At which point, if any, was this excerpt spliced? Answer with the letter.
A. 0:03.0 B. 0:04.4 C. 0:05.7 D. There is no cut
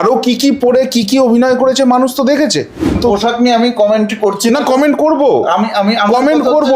A